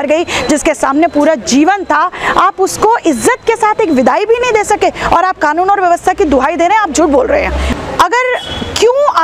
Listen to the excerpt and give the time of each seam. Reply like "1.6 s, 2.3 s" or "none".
7.7 s